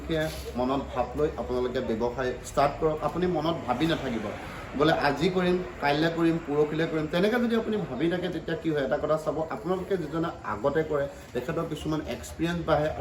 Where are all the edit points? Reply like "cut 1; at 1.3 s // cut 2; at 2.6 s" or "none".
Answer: none